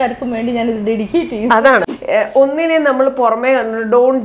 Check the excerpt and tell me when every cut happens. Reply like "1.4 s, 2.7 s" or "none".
1.9 s